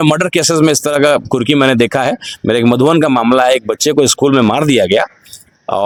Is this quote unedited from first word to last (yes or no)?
yes